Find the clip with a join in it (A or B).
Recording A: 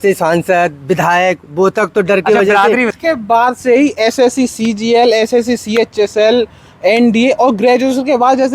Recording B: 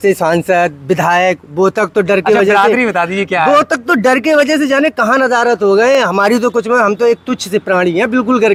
A